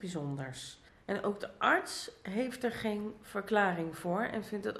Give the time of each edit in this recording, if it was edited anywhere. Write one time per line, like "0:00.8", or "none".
none